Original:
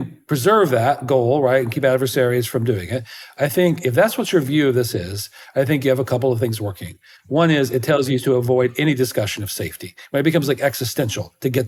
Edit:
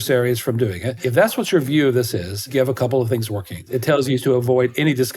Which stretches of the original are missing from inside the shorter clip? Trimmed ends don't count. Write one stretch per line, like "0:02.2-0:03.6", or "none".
0:03.1-0:03.8
0:05.3-0:05.8
0:07.0-0:07.7